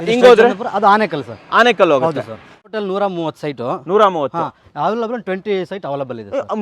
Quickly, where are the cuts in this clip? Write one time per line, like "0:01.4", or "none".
0:02.6